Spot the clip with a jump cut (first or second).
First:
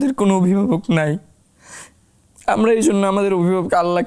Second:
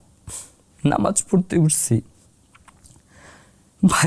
second